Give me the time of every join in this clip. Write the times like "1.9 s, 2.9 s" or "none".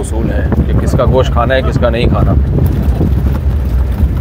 none